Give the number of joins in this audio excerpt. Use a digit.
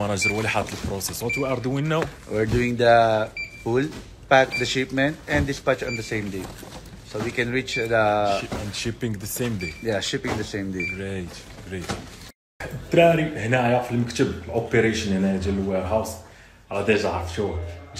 0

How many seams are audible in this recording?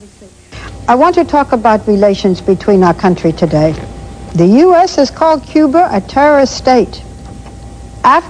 1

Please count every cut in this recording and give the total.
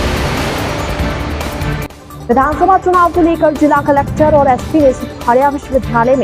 1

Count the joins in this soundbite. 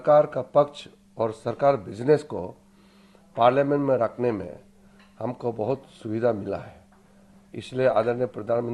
0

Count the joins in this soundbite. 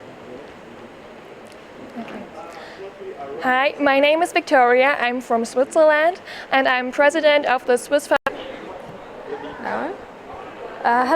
1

